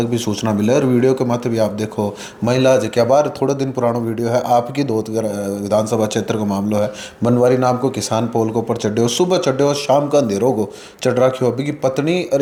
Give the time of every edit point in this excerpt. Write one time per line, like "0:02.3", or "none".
none